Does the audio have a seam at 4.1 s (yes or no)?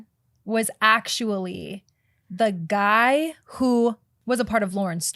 yes